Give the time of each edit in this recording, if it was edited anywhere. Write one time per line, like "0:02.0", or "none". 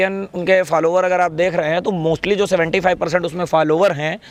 none